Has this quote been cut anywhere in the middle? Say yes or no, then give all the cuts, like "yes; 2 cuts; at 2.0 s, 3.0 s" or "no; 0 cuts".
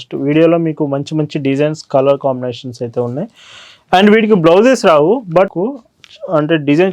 yes; 1 cut; at 5.6 s